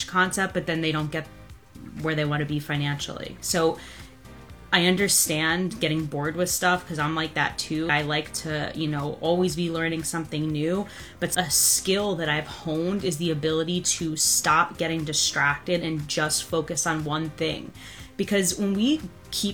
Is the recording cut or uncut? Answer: uncut